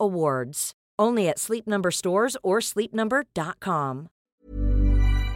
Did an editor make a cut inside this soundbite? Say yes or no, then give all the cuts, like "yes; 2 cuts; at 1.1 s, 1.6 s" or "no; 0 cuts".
yes; 1 cut; at 4.3 s